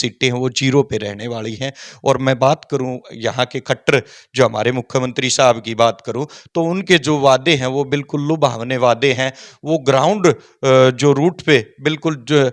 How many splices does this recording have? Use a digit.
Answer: 0